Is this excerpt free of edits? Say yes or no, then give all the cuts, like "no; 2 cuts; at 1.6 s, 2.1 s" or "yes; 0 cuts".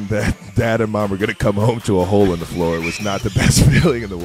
yes; 0 cuts